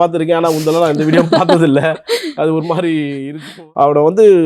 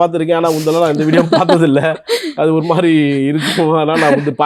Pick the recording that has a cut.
first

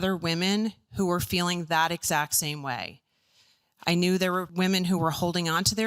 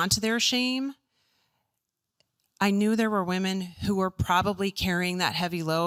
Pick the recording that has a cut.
first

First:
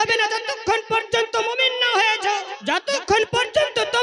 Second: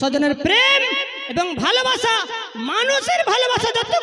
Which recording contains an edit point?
first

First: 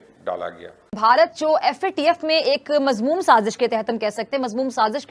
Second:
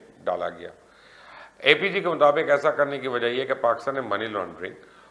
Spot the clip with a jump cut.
first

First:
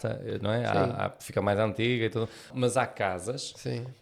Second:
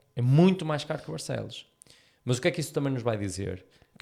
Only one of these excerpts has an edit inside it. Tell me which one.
first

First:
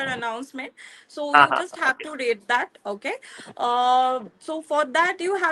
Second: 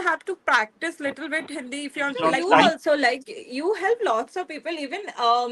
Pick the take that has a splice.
second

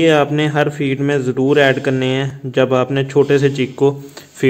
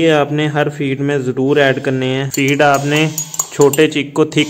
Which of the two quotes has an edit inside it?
second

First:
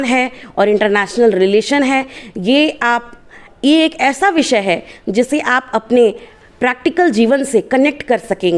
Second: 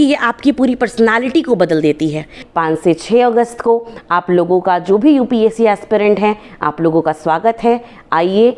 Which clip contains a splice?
second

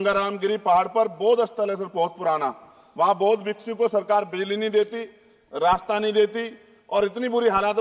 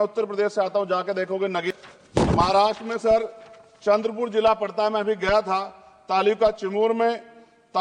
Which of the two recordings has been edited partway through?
second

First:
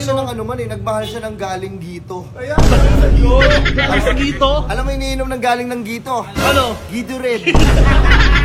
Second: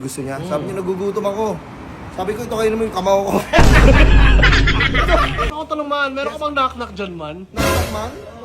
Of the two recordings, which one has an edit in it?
second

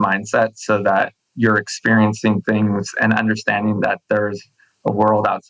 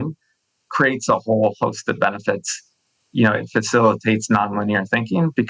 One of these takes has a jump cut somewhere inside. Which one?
second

